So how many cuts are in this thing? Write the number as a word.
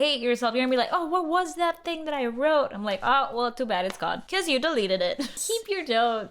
two